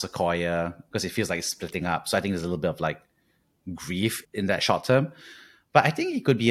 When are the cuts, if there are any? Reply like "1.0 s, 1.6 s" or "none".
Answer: 4.2 s